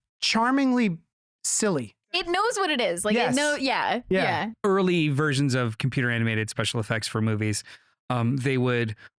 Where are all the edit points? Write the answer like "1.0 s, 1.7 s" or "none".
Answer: 2.2 s, 4.5 s